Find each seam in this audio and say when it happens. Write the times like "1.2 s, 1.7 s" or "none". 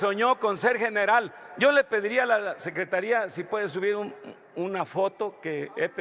none